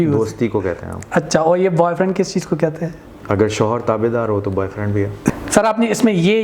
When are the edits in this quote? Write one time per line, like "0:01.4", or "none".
none

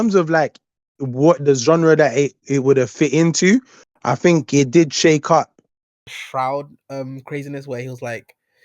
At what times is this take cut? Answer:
0:06.0

